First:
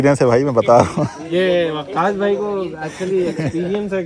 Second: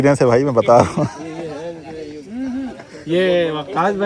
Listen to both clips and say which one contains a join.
first; 1 cut; at 1.2 s

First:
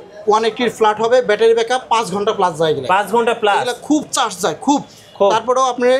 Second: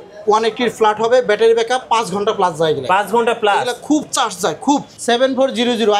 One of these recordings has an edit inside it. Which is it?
second; 1 cut; at 4.9 s

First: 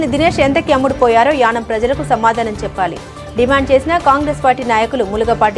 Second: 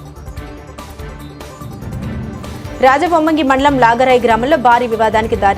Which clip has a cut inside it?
second; 1 cut; at 1.1 s

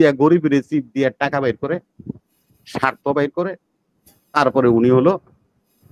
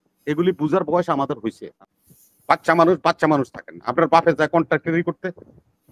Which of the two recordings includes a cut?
second; 1 cut; at 1.7 s

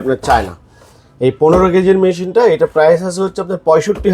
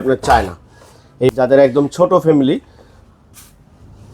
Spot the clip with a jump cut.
second; 1 cut; at 1.3 s

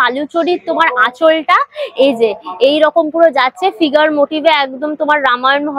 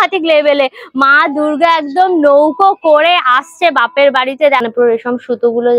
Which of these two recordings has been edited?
second; 1 cut; at 4.6 s

